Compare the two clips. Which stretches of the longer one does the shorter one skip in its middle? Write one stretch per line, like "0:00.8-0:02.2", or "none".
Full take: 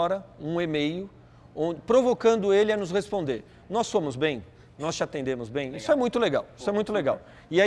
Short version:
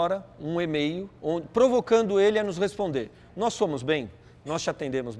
0:01.1-0:01.4